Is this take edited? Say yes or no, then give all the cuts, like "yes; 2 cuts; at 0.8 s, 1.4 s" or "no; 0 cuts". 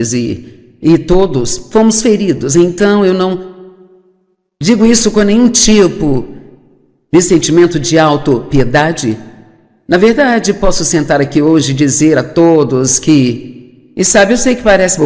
yes; 1 cut; at 12.7 s